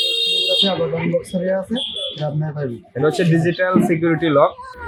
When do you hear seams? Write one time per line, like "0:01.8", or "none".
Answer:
none